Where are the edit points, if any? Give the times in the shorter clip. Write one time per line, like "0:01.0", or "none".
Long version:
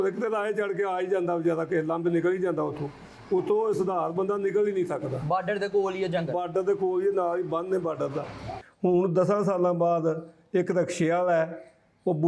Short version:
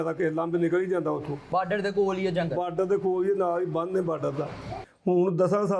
0:01.4